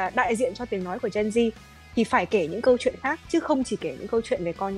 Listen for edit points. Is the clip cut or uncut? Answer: uncut